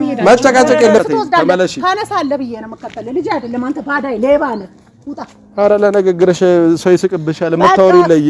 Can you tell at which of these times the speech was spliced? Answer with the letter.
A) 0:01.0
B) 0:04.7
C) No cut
A